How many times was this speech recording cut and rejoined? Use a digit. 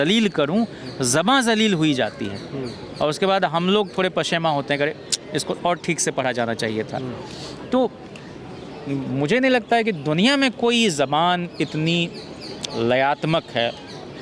0